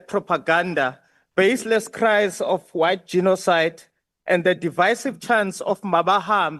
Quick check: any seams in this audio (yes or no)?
no